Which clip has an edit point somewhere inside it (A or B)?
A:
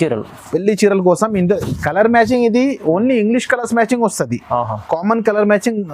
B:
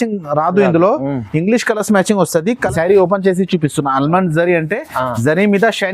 B